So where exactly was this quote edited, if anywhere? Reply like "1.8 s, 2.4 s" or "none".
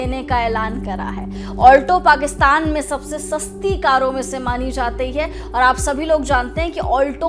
none